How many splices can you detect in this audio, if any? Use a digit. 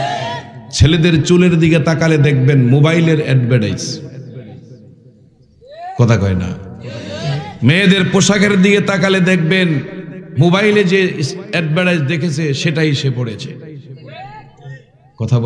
0